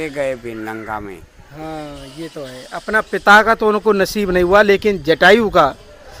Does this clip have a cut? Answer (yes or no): no